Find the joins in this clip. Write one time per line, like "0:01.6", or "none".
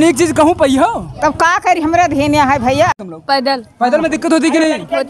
0:02.9